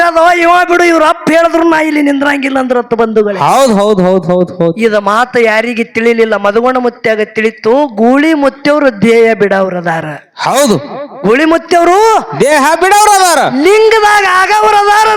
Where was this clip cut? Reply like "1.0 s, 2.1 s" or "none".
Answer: none

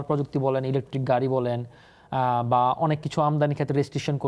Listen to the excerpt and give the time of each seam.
none

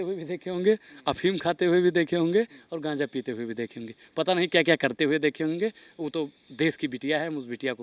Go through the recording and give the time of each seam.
none

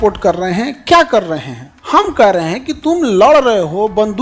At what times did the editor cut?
1.6 s

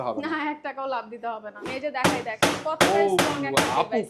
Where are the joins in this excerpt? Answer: 1.6 s

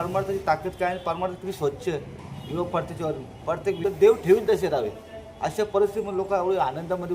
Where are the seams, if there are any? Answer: 3.8 s

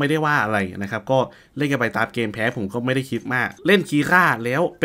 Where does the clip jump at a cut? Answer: 3.5 s

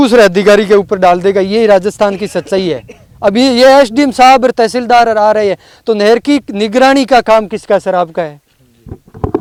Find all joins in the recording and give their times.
none

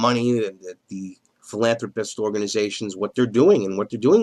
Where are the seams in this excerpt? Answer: none

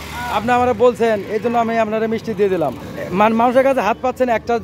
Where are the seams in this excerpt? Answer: 2.9 s

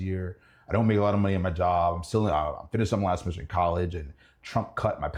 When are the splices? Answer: none

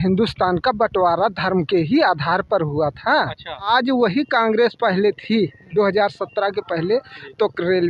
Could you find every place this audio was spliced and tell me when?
3.7 s

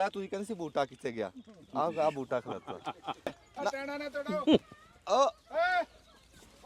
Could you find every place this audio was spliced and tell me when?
3.4 s

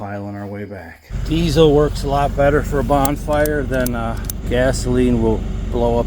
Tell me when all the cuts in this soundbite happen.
1.1 s, 4.3 s

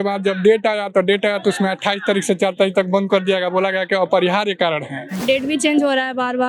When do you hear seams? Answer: 5.2 s

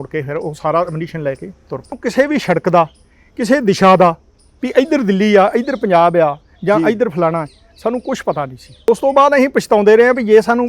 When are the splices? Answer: 2.0 s, 8.9 s

